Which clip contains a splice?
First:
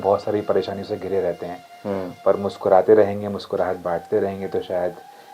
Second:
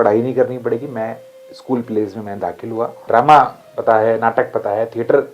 second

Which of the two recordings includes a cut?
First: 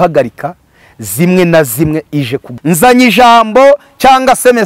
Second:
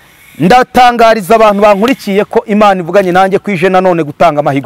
first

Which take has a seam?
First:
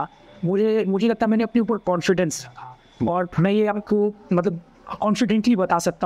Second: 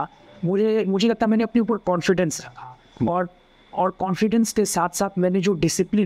first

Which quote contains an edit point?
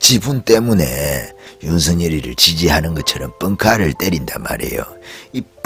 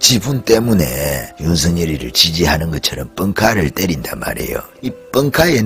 second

